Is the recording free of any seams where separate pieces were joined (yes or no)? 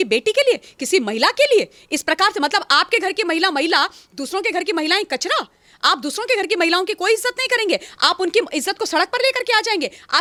yes